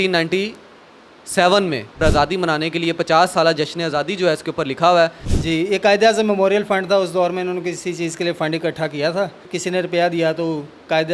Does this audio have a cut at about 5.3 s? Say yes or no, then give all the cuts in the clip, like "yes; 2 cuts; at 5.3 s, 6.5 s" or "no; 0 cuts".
yes; 3 cuts; at 2.0 s, 5.3 s, 9.5 s